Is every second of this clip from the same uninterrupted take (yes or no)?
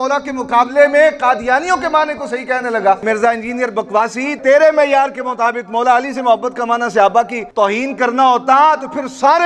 no